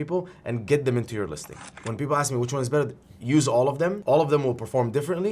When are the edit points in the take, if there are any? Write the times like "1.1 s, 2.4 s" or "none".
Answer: 1.6 s, 4.0 s